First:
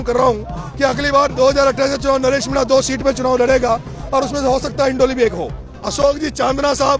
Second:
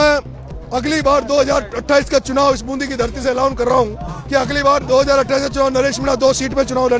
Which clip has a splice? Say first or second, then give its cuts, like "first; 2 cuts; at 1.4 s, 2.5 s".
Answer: first; 1 cut; at 6.0 s